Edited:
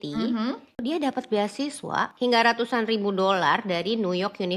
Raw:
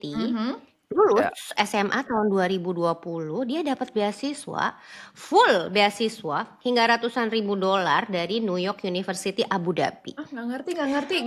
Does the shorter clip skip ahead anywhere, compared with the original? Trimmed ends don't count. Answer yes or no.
yes